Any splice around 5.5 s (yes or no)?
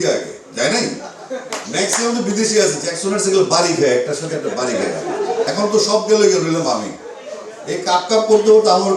yes